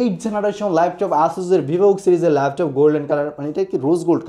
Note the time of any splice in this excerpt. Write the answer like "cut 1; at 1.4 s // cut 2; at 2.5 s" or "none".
none